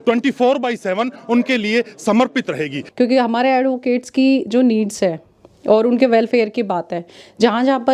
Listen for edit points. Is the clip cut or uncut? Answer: cut